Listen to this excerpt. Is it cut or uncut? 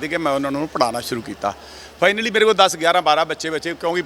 uncut